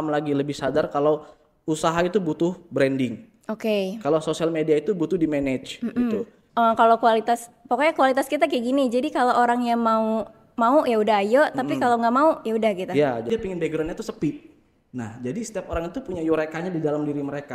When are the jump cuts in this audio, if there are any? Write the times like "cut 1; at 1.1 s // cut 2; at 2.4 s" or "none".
cut 1; at 6.4 s // cut 2; at 13.2 s